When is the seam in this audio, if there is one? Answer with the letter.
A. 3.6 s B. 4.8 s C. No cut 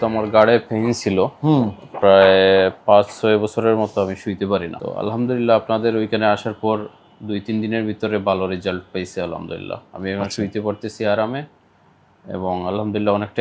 B